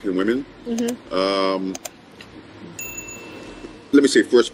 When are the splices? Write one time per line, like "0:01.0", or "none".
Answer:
none